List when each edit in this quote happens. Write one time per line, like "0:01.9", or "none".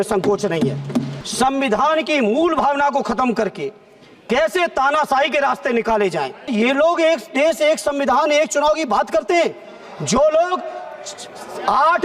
0:01.2
0:06.5